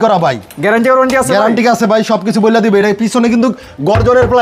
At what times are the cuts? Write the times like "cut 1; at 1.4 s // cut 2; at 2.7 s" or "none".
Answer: none